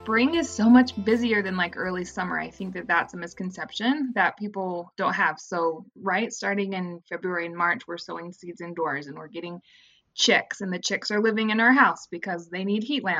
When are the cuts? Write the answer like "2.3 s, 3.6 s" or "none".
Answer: 0.9 s